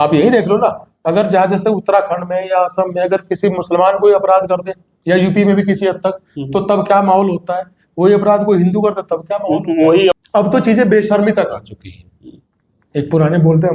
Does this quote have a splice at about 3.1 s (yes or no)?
no